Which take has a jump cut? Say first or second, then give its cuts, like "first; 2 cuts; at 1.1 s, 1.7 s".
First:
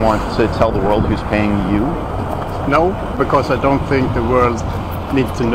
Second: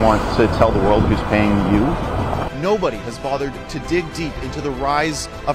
second; 1 cut; at 2.5 s